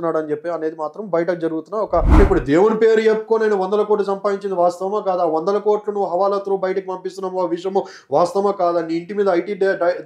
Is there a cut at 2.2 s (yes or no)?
yes